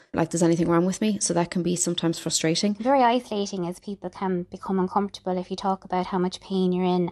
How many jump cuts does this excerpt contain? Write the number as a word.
one